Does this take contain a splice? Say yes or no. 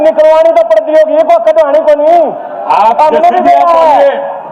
no